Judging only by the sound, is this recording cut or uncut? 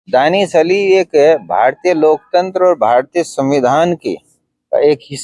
uncut